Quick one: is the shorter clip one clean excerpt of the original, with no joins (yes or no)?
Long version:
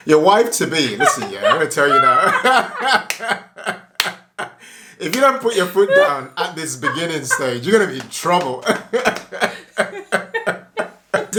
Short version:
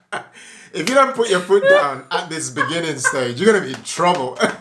yes